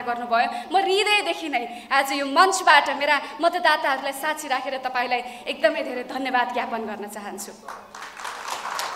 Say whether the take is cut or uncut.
uncut